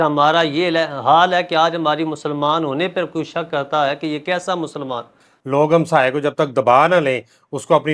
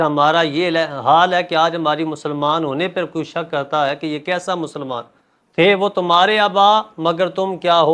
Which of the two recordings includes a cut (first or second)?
first